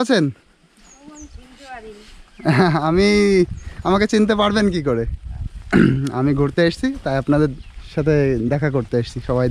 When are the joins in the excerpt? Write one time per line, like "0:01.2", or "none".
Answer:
none